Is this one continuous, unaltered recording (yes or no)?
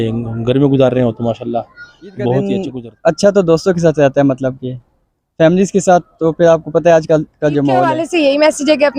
no